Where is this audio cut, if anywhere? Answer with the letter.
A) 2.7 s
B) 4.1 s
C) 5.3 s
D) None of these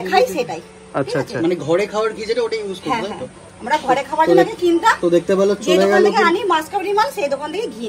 D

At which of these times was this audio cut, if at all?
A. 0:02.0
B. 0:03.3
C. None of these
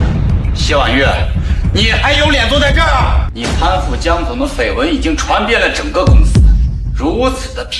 B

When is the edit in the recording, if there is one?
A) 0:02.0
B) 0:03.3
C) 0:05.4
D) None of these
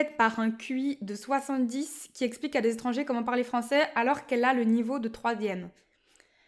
D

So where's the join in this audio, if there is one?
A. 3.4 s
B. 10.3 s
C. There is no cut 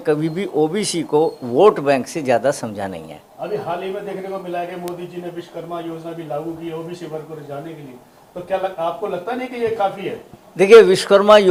C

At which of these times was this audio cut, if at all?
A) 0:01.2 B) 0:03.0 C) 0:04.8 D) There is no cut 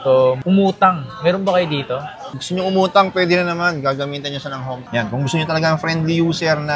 C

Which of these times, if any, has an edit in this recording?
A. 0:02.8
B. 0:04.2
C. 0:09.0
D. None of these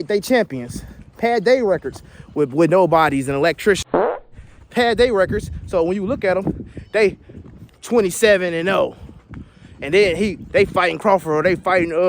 B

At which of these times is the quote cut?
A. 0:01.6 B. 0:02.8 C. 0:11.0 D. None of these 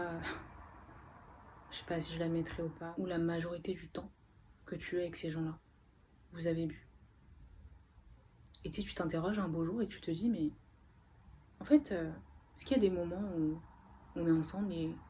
B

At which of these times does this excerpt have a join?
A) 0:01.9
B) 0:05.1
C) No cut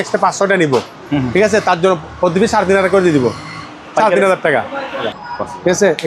B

